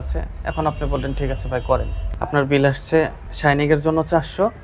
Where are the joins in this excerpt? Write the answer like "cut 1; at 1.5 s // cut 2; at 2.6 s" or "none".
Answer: cut 1; at 2.1 s